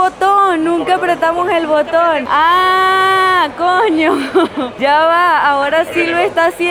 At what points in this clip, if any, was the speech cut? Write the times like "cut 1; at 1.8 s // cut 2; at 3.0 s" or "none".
none